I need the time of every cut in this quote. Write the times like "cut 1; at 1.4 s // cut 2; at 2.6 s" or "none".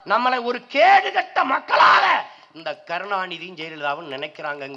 none